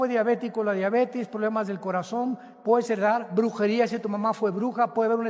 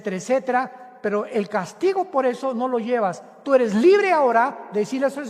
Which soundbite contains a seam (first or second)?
second